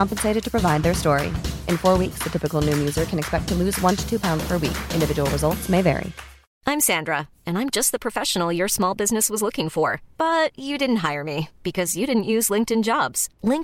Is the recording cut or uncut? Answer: cut